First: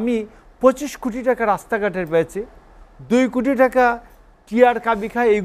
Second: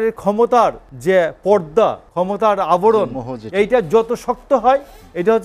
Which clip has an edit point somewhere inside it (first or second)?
second